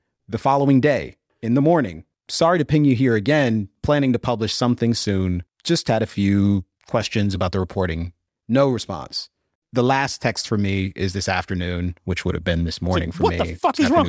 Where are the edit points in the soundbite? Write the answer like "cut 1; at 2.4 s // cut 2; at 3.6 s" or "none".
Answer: cut 1; at 3.7 s // cut 2; at 7.3 s // cut 3; at 9.5 s